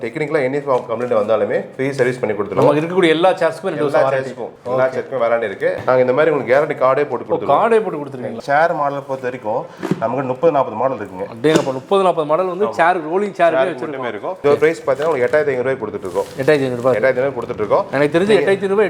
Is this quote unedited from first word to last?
no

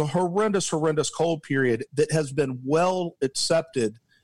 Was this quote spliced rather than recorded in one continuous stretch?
no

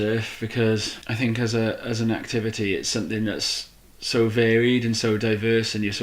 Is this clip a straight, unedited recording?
no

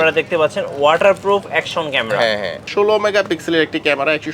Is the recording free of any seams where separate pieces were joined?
no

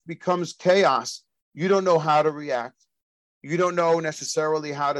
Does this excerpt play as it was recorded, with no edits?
yes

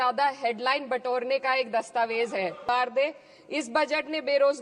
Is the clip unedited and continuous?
no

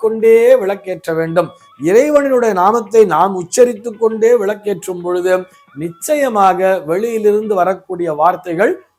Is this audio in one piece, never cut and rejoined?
yes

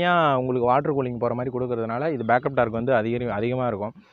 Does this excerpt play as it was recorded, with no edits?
yes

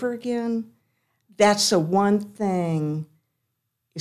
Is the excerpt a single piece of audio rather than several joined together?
yes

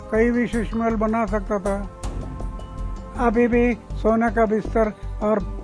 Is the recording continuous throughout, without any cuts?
yes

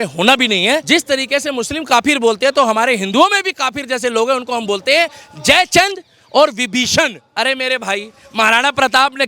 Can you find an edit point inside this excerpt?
yes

